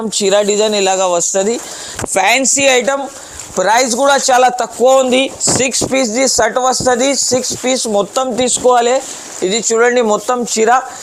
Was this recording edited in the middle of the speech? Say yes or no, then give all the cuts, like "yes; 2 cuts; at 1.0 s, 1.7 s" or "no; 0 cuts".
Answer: no; 0 cuts